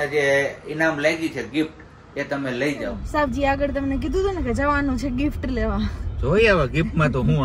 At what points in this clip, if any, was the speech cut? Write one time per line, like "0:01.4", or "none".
0:03.0